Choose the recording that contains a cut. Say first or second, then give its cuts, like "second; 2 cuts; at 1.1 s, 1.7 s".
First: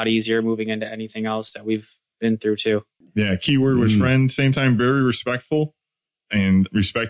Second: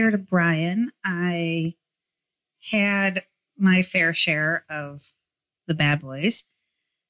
first; 1 cut; at 3.0 s